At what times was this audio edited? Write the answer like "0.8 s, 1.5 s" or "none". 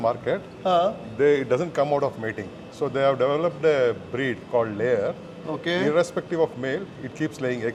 none

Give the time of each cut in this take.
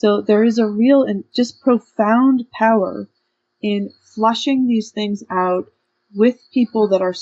1.2 s

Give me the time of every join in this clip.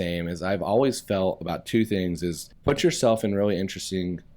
2.5 s

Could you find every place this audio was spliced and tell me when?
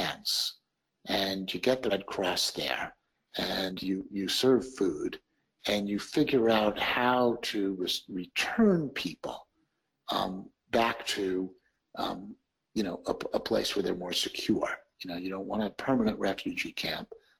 1.9 s

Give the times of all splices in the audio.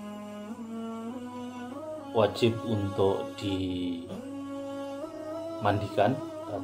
2.1 s

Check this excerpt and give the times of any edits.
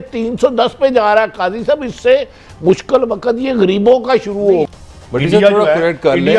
4.7 s

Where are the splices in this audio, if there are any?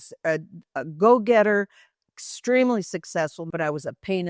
3.4 s

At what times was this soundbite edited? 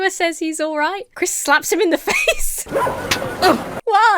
1.1 s, 2.5 s

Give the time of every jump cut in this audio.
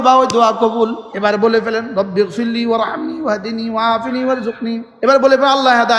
1.0 s, 4.9 s

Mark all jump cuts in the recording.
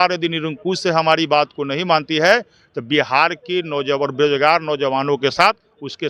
none

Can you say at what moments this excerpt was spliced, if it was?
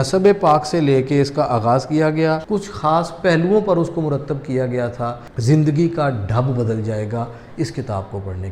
2.4 s, 5.4 s

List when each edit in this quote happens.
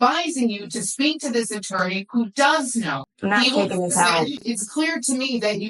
3.0 s, 4.4 s

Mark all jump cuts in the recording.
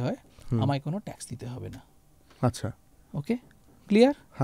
none

